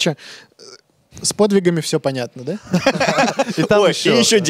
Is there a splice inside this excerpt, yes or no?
no